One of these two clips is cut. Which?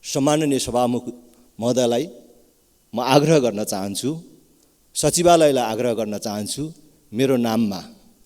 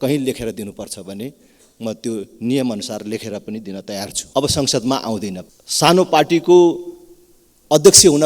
second; 2 cuts; at 4.1 s, 5.4 s

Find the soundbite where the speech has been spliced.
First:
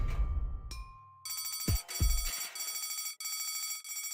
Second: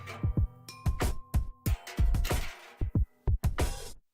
second; 1 cut; at 2.3 s

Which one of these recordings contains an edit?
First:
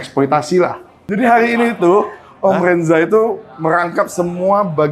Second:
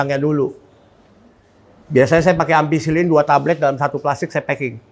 first; 1 cut; at 0.9 s

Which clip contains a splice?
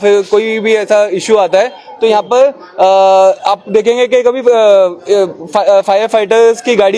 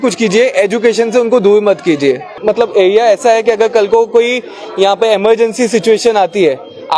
second; 1 cut; at 2.3 s

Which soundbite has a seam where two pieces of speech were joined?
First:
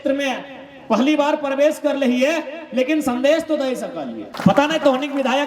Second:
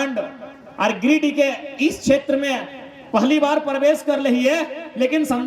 first; 1 cut; at 4.3 s

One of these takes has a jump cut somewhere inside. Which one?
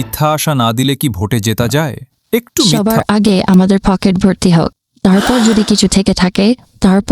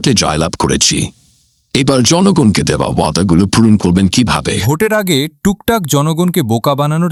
first; 1 cut; at 2.7 s

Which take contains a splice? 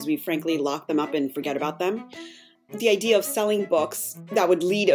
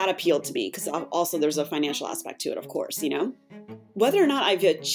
first; 1 cut; at 2.6 s

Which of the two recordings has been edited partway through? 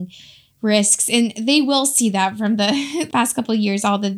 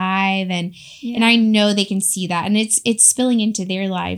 first; 1 cut; at 3.1 s

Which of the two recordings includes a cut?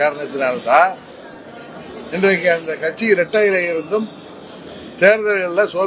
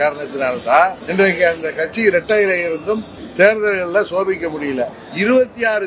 second; 3 cuts; at 1.0 s, 3.2 s, 5.0 s

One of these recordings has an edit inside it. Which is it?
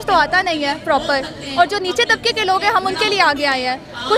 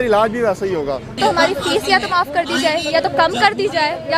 second; 1 cut; at 1.2 s

